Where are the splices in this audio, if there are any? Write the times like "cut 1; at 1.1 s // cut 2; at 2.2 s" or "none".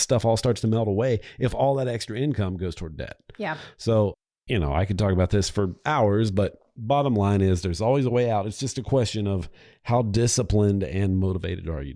none